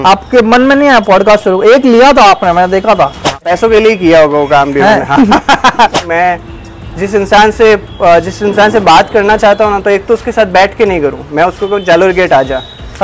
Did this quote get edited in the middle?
yes; 2 cuts; at 3.4 s, 5.9 s

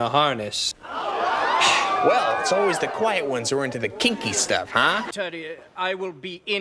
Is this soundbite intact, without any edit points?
no; 1 cut; at 5.1 s

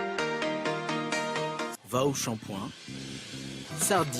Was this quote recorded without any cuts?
no; 2 cuts; at 0.8 s, 1.8 s

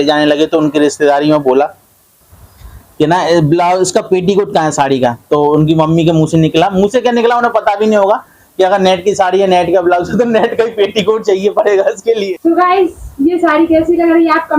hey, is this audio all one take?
no; 1 cut; at 12.3 s

